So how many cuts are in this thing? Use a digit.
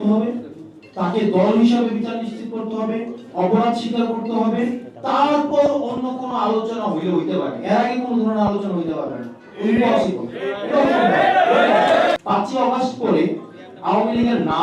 1